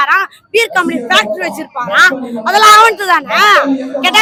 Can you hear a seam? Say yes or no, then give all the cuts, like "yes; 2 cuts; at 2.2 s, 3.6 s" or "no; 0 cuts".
no; 0 cuts